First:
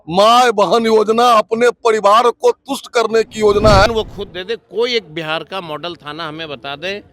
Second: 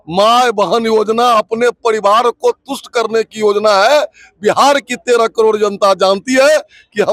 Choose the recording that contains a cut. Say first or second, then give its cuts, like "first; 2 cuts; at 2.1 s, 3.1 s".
first; 1 cut; at 3.9 s